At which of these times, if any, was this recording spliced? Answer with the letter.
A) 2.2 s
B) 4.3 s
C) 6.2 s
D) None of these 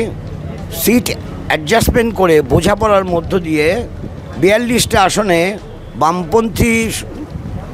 D